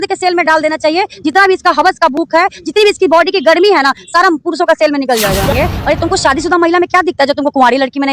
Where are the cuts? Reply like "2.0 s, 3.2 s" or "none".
5.5 s